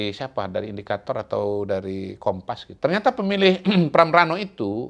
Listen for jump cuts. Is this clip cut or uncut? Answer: cut